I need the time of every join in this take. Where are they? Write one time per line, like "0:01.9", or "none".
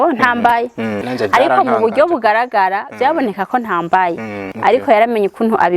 0:01.0
0:04.4